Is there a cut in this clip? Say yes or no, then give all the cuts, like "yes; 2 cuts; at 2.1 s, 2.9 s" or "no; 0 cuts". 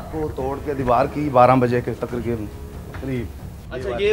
no; 0 cuts